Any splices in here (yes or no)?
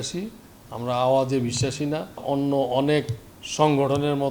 yes